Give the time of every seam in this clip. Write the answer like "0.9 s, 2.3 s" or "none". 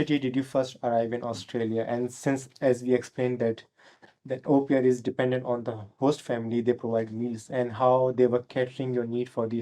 none